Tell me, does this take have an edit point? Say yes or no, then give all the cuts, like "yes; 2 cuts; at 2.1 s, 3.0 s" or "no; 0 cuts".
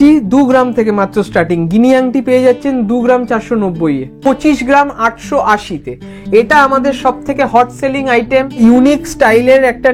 yes; 2 cuts; at 4.1 s, 8.5 s